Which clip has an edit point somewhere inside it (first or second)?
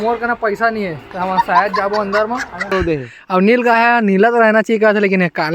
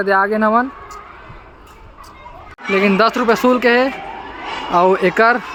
first